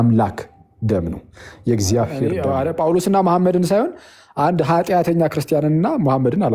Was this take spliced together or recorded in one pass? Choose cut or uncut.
cut